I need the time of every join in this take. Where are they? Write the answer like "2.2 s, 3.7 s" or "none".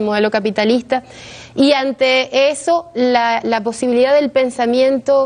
1.4 s

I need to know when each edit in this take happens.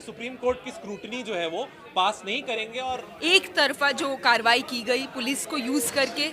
2.9 s

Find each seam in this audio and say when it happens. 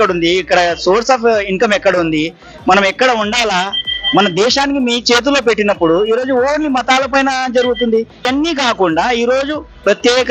8.3 s

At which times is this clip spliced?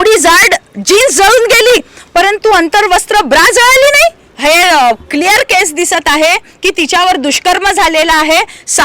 4.3 s

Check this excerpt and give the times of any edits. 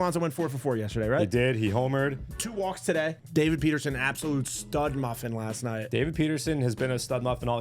3.2 s

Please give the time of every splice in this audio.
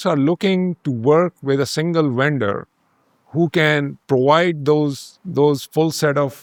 none

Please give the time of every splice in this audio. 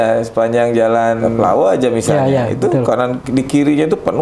1.3 s, 3.2 s

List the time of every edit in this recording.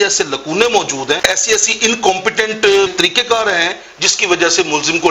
1.2 s, 2.9 s

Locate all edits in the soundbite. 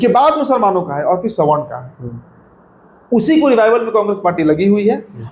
none

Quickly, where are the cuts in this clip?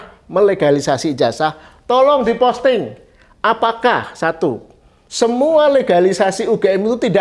none

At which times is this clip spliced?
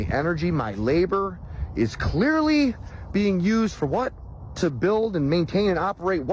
none

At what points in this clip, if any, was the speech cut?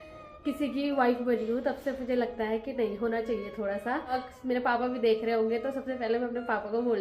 4.3 s

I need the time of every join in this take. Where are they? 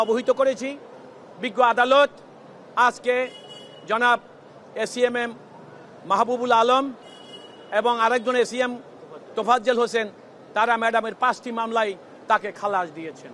none

